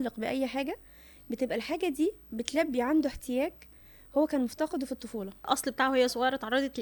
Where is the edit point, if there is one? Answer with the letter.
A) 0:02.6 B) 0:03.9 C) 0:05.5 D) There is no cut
C